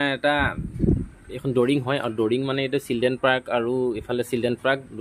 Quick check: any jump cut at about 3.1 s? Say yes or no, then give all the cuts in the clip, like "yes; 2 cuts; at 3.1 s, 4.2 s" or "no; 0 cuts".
no; 0 cuts